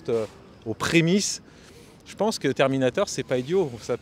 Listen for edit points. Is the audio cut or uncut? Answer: uncut